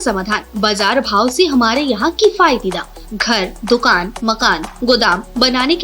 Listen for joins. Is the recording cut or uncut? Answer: uncut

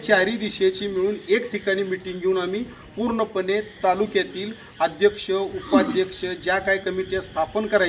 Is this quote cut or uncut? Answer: uncut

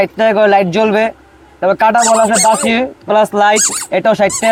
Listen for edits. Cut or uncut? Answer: uncut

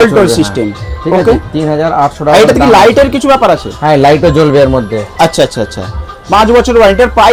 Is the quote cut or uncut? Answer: uncut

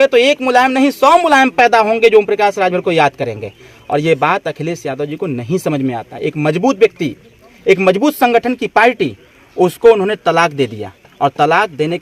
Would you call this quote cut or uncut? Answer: uncut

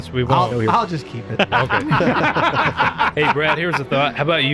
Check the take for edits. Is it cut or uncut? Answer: uncut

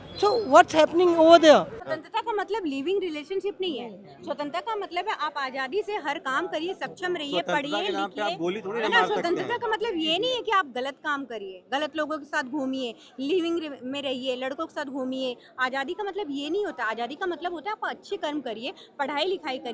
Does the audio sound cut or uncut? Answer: cut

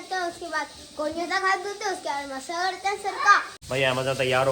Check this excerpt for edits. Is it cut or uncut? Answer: cut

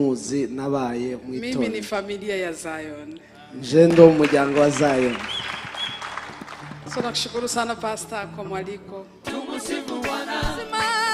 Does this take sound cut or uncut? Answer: cut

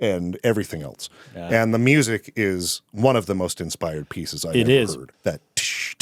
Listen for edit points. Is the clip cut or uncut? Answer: cut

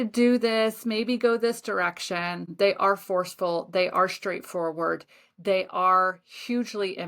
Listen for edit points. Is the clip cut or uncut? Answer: cut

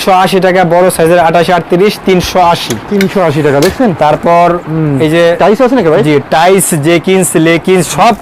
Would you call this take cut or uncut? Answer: uncut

